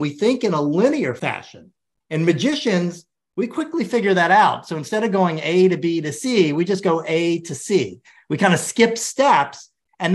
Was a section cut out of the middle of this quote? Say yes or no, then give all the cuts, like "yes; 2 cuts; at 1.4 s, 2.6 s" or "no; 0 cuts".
yes; 1 cut; at 1.2 s